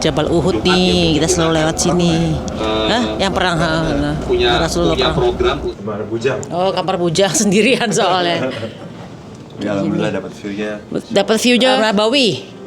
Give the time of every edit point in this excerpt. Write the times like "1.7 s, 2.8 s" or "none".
5.7 s, 11.8 s